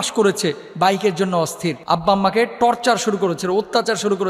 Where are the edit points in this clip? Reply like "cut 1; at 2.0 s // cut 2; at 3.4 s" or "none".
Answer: cut 1; at 1.8 s

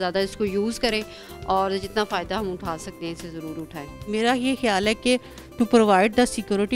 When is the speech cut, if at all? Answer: cut 1; at 4.0 s

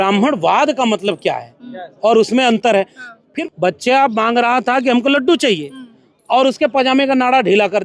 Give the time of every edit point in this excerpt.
cut 1; at 3.4 s

